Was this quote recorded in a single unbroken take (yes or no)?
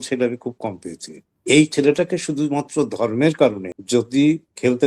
no